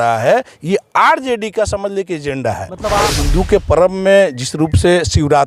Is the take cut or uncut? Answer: cut